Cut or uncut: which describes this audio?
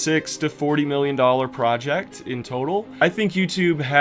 cut